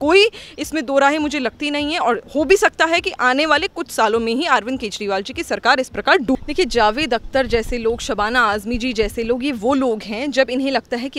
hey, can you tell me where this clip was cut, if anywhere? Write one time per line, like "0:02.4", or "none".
0:06.4